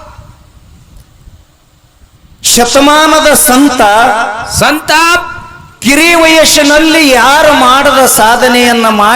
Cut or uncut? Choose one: uncut